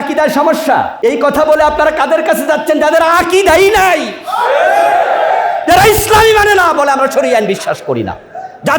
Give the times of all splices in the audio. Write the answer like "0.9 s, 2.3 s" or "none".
0.9 s